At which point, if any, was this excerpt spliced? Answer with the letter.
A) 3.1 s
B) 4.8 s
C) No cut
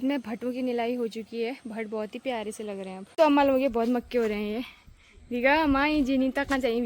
A